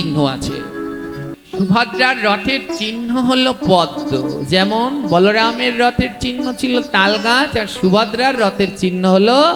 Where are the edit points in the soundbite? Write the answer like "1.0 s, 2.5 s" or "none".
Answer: 1.2 s